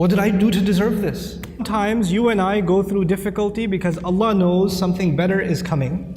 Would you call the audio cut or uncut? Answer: cut